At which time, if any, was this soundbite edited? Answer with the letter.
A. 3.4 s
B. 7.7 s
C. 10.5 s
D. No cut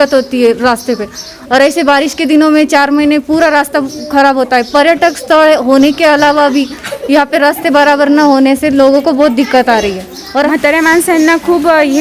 C